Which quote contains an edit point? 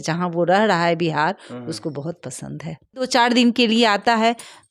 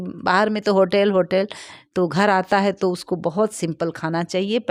first; 1 cut; at 2.9 s

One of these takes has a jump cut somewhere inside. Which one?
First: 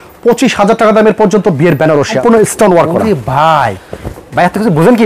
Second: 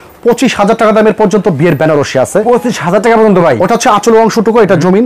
first; 1 cut; at 2.2 s

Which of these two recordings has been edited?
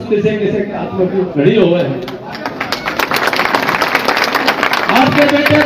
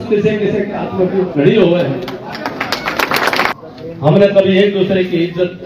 second; 1 cut; at 3.5 s

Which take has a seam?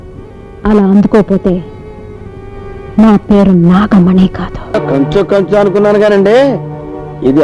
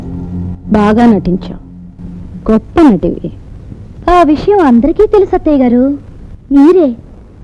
first; 1 cut; at 4.8 s

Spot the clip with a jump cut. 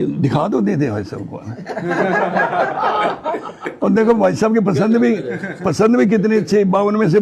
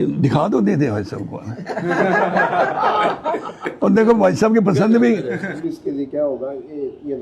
second; 1 cut; at 5.5 s

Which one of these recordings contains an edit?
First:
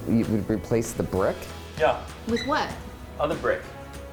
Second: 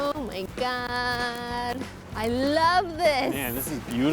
second; 1 cut; at 2.0 s

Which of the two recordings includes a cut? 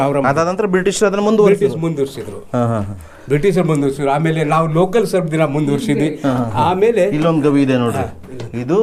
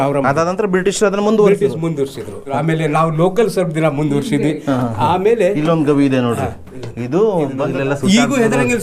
second; 2 cuts; at 2.5 s, 7.7 s

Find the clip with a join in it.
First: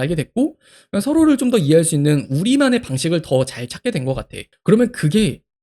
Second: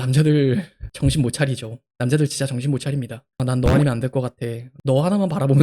second; 1 cut; at 4.7 s

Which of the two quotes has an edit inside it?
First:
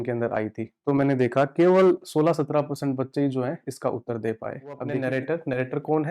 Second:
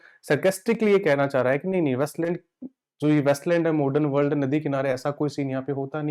first; 1 cut; at 4.9 s

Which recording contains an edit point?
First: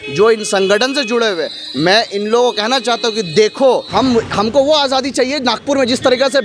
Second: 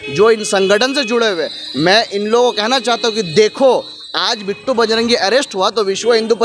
first; 1 cut; at 3.9 s

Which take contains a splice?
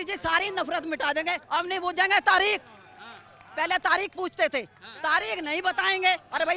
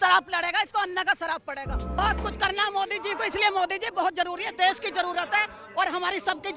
second; 1 cut; at 2.0 s

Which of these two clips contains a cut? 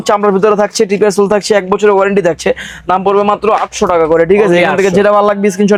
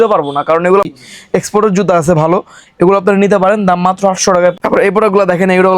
second; 2 cuts; at 0.9 s, 4.6 s

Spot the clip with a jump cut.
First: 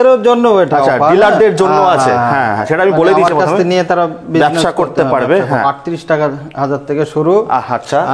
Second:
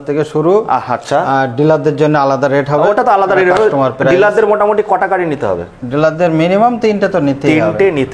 first; 1 cut; at 5.6 s

